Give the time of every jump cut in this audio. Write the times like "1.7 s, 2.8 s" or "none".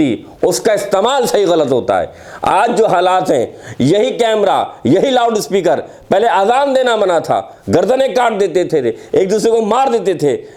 none